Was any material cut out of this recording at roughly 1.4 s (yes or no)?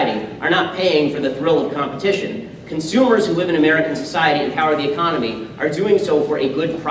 yes